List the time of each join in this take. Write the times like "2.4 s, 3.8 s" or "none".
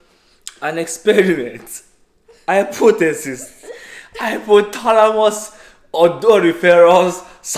none